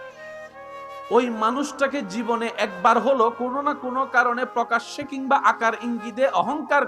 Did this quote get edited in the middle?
yes; 1 cut; at 1.0 s

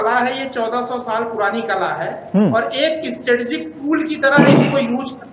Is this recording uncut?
yes; 0 cuts

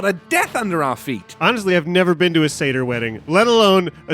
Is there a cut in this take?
yes; 1 cut; at 1.1 s

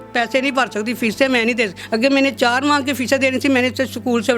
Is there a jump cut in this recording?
yes; 1 cut; at 1.8 s

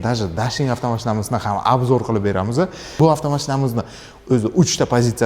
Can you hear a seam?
yes; 1 cut; at 2.9 s

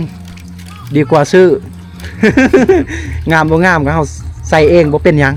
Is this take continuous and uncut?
yes; 0 cuts

